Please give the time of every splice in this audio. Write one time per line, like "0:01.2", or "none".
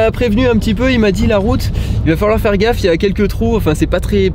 none